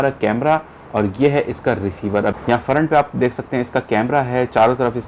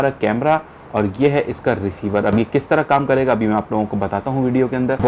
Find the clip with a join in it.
first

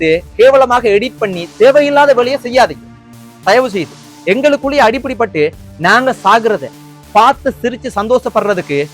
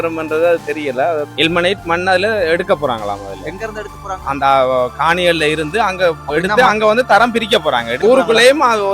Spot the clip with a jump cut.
second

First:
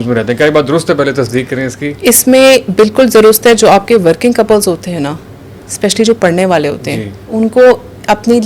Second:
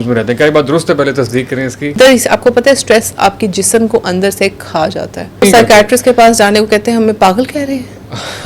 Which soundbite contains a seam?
second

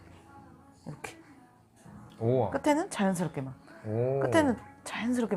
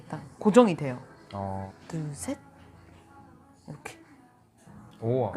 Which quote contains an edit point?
second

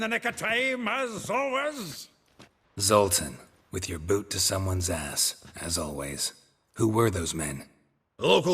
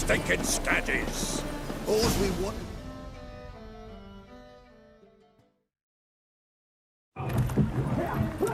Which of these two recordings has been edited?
first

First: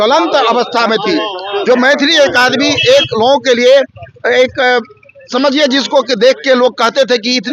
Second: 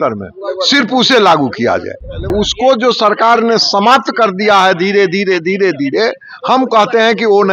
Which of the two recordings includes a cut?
second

